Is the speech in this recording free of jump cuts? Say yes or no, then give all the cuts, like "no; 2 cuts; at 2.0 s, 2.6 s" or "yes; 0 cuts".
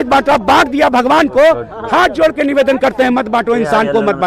yes; 0 cuts